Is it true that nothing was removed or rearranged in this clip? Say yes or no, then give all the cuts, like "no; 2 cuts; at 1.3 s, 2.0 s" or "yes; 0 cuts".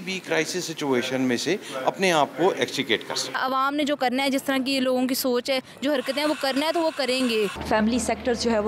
no; 2 cuts; at 3.3 s, 7.6 s